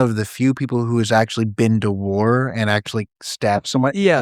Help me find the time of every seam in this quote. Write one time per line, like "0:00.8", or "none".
none